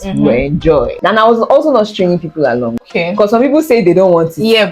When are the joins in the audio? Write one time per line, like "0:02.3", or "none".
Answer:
0:00.9
0:02.9